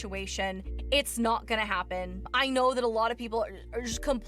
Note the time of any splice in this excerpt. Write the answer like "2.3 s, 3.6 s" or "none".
2.4 s